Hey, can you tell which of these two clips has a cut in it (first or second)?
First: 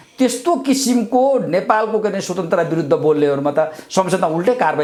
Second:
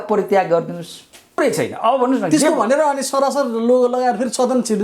second